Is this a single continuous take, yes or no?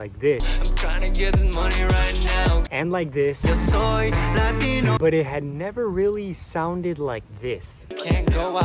no